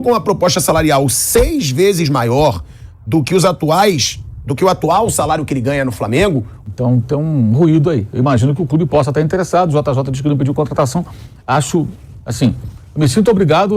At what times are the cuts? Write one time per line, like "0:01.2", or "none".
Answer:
0:06.6